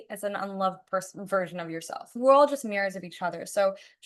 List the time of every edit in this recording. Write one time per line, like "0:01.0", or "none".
0:02.1